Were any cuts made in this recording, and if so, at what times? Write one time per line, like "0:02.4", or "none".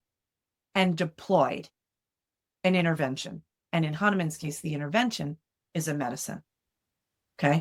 none